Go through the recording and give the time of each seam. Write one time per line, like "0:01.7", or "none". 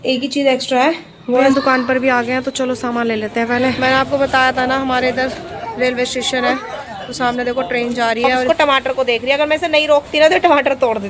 0:01.4
0:03.8
0:08.5